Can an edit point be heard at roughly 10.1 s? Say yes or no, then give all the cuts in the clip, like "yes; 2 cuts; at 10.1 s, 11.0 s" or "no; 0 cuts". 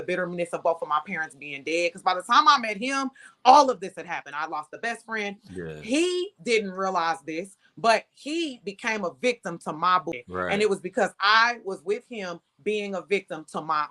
yes; 1 cut; at 10.1 s